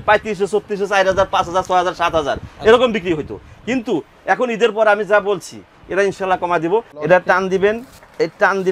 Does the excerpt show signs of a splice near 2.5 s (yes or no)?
no